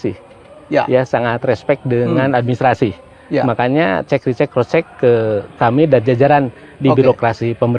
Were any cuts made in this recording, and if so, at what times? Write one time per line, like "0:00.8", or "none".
none